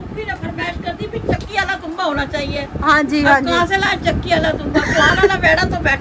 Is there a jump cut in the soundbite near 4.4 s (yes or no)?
no